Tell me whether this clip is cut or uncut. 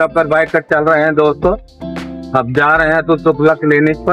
uncut